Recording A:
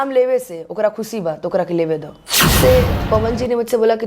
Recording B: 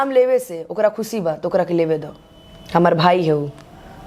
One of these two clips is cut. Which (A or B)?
A